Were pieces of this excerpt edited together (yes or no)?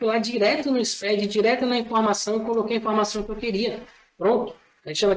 no